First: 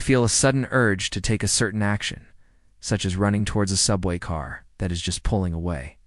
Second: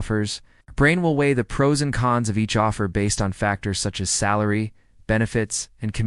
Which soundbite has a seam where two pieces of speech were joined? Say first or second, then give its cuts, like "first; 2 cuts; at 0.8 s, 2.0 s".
first; 1 cut; at 4.3 s